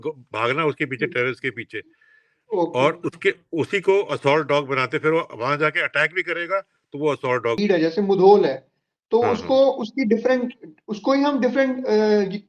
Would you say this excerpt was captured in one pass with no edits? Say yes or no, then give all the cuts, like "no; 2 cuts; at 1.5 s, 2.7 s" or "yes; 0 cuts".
no; 1 cut; at 7.6 s